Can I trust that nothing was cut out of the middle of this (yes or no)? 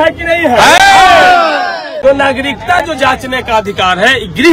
no